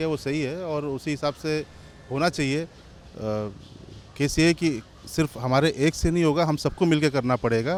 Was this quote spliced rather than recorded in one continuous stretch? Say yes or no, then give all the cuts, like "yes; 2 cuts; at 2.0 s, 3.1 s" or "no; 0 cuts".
no; 0 cuts